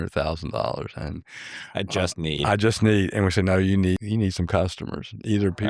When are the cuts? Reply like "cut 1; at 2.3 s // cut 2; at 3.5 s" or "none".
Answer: cut 1; at 4.0 s

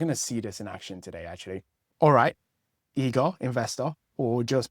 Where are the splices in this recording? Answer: cut 1; at 1.8 s

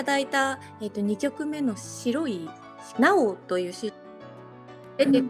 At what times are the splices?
none

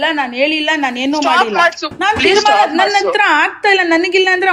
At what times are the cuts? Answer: cut 1; at 1.9 s

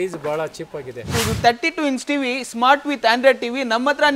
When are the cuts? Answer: cut 1; at 1.0 s

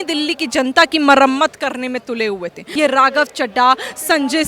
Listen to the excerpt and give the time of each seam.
cut 1; at 2.6 s

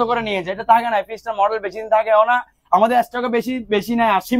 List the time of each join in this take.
none

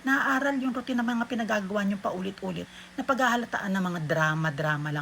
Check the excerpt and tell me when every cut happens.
cut 1; at 2.7 s

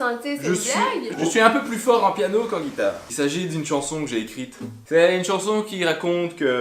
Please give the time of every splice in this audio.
cut 1; at 3.1 s // cut 2; at 4.8 s

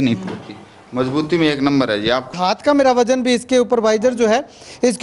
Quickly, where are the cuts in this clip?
cut 1; at 2.3 s

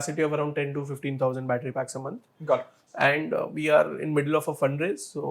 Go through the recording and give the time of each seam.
cut 1; at 2.3 s

